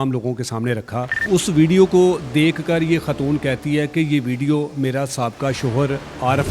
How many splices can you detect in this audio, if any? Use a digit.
1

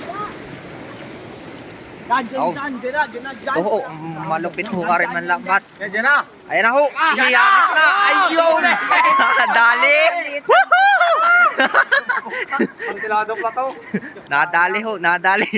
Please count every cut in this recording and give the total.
1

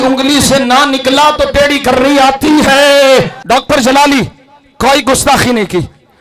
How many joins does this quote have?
1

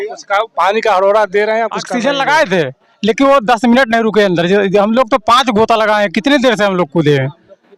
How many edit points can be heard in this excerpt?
1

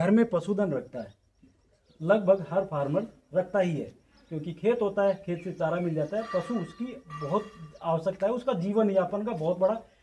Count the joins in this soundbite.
0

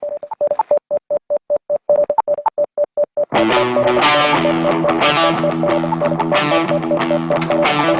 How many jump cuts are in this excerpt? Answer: 1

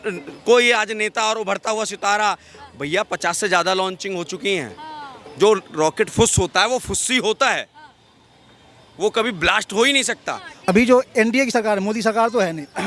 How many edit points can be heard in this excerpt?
1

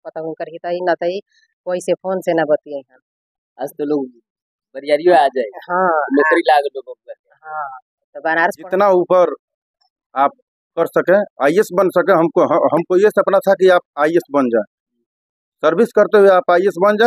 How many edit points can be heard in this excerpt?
1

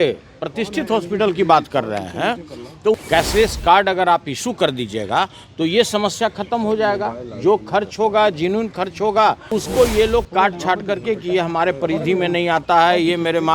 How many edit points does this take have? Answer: 2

